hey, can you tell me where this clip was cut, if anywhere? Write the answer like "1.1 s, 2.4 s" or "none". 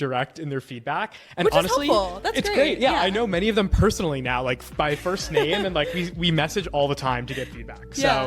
none